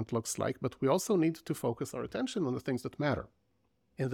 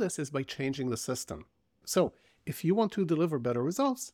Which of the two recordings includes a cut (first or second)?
second